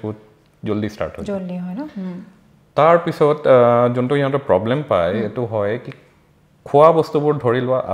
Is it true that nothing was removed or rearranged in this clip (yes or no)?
yes